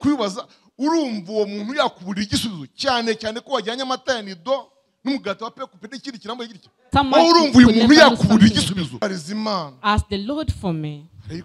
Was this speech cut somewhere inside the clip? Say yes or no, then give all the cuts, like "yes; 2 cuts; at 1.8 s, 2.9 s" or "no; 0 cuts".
yes; 2 cuts; at 6.8 s, 9.0 s